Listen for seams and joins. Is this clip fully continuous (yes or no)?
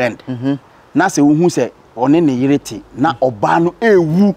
yes